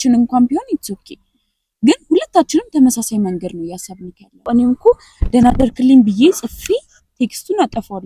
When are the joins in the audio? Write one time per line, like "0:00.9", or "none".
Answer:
0:04.4